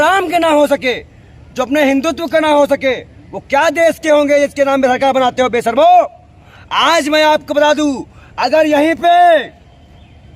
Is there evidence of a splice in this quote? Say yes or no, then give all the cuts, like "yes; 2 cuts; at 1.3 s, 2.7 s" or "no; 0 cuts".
no; 0 cuts